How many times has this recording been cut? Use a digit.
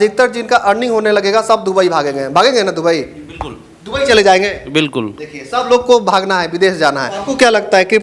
1